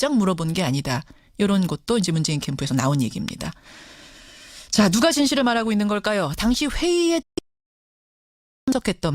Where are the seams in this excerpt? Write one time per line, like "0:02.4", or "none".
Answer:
0:02.9